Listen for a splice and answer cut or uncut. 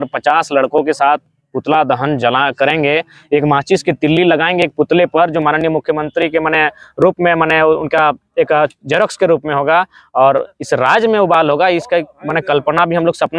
uncut